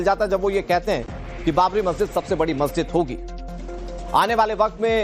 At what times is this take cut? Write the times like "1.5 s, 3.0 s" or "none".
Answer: 1.9 s